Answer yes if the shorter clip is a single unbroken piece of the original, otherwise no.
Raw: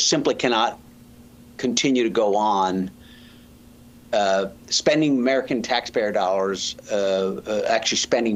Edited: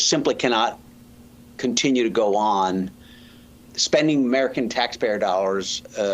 no